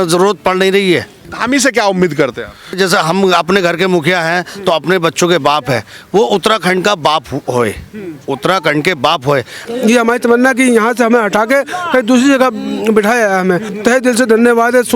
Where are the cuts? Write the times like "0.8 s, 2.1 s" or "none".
1.3 s, 2.8 s, 9.7 s, 13.7 s